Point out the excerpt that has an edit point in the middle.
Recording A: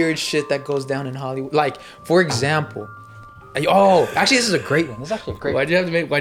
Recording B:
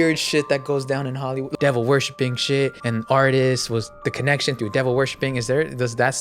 B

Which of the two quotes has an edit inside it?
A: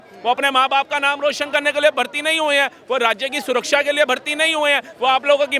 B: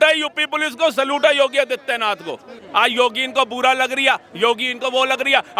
B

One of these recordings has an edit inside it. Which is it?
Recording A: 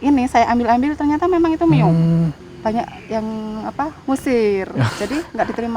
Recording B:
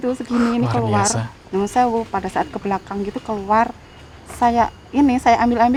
A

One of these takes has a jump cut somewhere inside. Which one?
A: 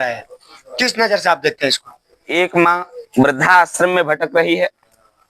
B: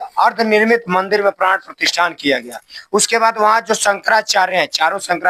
A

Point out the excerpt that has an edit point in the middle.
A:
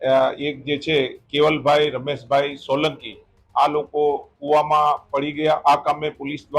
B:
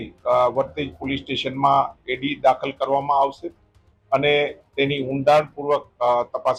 A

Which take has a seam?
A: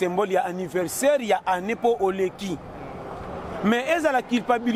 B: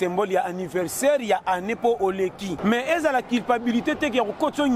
B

